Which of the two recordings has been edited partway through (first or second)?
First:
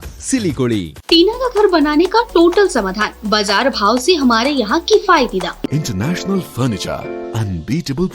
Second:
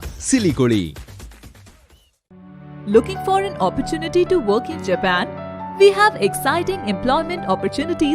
first